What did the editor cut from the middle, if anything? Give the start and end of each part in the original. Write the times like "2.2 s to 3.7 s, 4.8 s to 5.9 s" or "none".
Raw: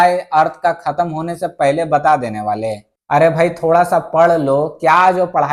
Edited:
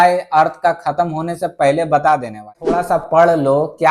2.6 s to 3.6 s